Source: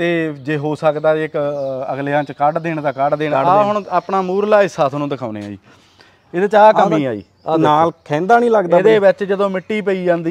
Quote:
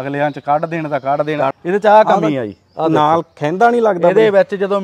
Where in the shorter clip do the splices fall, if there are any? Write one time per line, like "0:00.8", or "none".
0:01.5